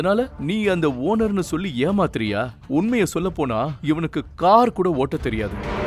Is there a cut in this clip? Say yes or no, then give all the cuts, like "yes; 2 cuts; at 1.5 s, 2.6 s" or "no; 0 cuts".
no; 0 cuts